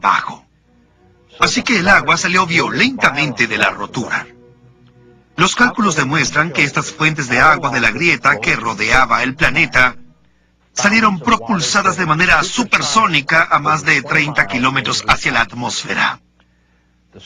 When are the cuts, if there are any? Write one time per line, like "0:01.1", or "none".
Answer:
0:07.4